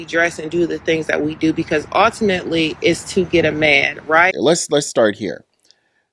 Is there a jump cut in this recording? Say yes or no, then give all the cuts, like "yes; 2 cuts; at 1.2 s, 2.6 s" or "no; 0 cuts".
yes; 1 cut; at 4.3 s